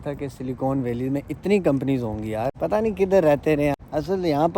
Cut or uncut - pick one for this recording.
cut